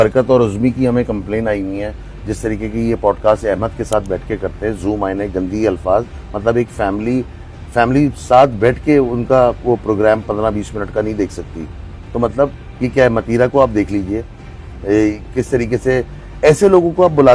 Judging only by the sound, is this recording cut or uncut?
uncut